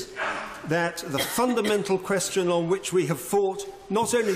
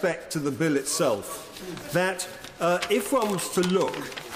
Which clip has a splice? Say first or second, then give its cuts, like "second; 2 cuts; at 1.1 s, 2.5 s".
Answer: first; 1 cut; at 2.2 s